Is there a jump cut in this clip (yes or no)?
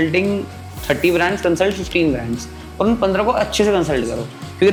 no